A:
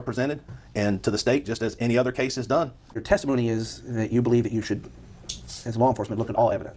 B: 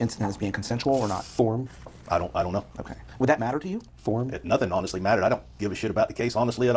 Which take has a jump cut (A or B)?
A